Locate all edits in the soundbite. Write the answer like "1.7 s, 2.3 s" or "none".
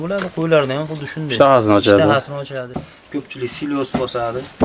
2.6 s